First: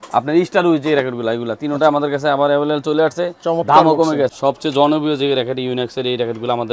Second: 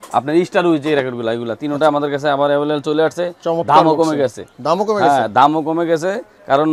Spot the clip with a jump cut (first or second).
first